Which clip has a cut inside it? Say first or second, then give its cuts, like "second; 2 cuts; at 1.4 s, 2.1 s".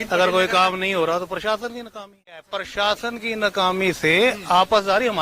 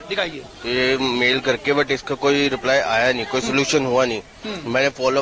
first; 1 cut; at 2.6 s